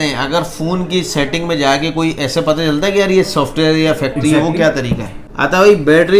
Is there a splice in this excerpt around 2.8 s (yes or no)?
no